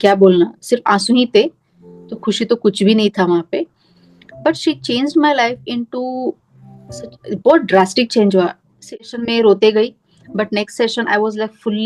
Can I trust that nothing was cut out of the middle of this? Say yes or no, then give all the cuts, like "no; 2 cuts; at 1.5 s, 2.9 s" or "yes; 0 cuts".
no; 1 cut; at 9.0 s